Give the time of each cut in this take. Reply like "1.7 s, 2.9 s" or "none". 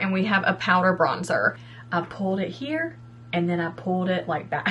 1.7 s